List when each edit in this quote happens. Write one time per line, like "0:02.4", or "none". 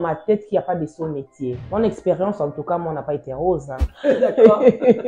0:01.6
0:03.9